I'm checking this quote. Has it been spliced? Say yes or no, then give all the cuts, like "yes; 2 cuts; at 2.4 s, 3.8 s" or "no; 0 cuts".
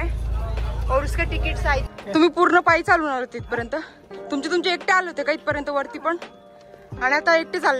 yes; 1 cut; at 1.9 s